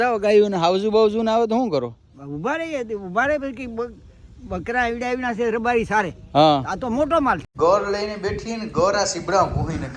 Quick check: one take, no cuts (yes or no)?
no